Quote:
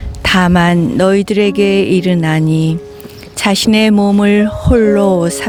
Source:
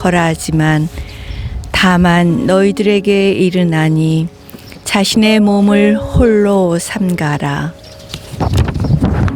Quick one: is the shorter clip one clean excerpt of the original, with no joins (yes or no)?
yes